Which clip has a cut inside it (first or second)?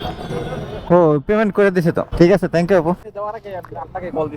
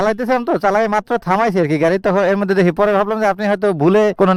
first